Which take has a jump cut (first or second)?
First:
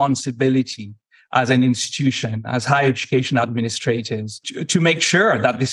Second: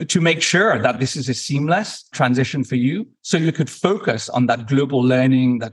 second